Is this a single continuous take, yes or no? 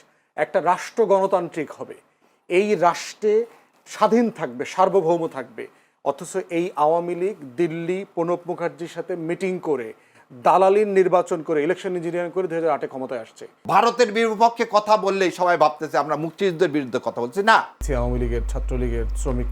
no